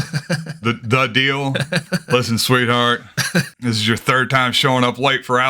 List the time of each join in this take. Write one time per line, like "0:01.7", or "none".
0:01.8
0:03.5